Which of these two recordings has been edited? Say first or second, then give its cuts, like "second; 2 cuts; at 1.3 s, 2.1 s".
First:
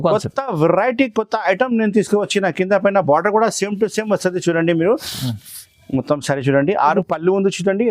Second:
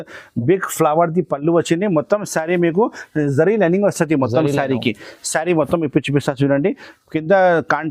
first; 1 cut; at 7.0 s